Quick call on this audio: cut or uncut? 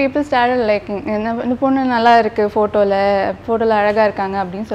uncut